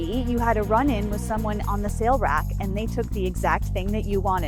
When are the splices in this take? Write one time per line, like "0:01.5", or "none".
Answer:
none